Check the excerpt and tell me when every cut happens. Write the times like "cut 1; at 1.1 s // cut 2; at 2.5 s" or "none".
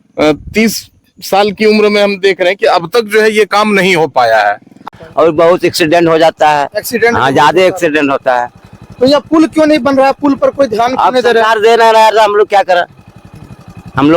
cut 1; at 4.8 s